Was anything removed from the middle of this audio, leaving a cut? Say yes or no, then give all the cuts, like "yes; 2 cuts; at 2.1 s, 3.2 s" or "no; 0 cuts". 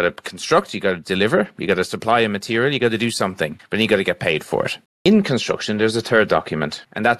yes; 1 cut; at 4.9 s